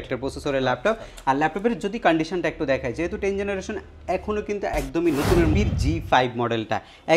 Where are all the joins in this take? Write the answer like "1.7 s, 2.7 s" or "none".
5.5 s